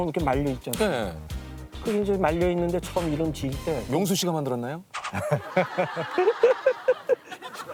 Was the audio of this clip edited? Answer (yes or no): no